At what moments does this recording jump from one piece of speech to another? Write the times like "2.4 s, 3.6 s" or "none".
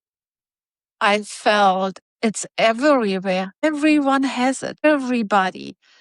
2.0 s, 3.6 s, 4.8 s